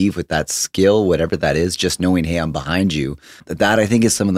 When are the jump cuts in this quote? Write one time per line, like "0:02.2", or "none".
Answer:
0:03.4